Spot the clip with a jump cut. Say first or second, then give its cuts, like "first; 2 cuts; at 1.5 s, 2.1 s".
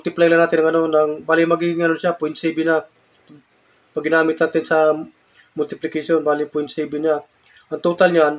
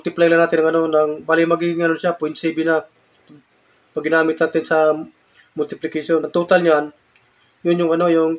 second; 1 cut; at 6.2 s